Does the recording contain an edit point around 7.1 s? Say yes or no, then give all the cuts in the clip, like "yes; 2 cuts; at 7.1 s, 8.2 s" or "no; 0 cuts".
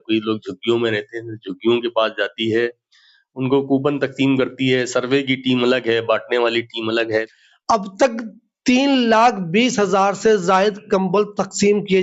yes; 1 cut; at 7.1 s